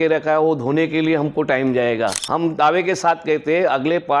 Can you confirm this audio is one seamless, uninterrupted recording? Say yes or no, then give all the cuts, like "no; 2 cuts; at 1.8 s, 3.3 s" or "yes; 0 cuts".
no; 1 cut; at 2.2 s